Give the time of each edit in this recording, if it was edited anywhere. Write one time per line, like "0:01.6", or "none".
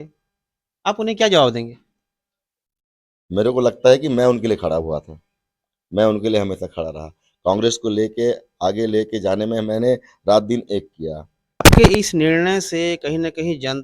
0:11.6